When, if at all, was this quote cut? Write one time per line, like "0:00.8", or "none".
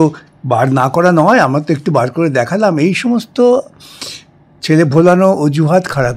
none